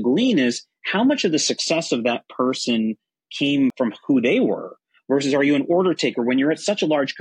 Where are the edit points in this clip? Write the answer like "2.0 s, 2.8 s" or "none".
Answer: none